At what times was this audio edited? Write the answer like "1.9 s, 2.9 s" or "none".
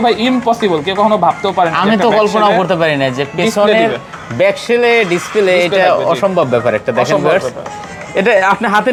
none